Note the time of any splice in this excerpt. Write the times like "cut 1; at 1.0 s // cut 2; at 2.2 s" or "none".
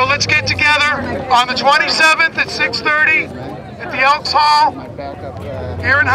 none